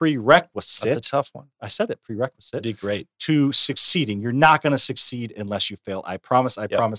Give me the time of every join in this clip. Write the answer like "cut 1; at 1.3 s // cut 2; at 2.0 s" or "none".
none